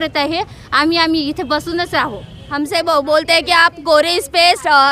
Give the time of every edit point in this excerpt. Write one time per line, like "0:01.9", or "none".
0:02.2